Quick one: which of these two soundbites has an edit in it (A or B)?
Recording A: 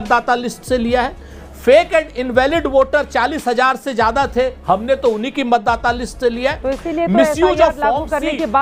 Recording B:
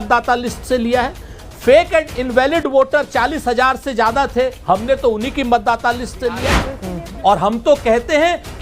B